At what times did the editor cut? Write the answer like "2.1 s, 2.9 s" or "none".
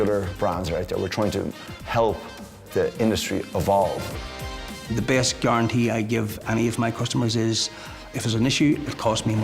4.3 s, 8.1 s